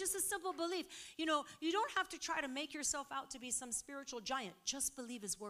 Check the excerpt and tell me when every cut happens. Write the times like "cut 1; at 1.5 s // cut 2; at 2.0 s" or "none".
none